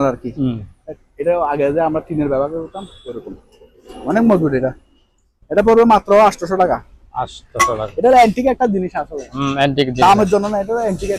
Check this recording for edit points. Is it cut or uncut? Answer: uncut